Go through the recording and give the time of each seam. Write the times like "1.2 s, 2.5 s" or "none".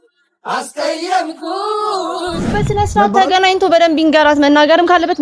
2.6 s